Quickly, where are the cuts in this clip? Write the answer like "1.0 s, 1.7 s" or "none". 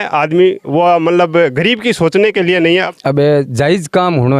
2.9 s